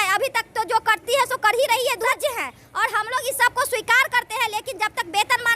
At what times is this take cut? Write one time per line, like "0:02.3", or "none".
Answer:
0:02.1